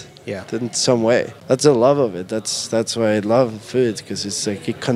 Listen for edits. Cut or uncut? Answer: cut